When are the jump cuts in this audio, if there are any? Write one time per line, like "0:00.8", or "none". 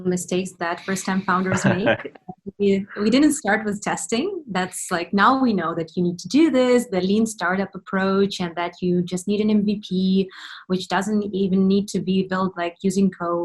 none